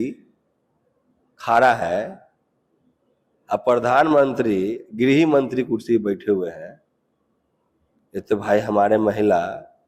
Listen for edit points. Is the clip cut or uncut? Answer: uncut